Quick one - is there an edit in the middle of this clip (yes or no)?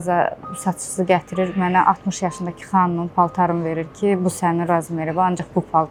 no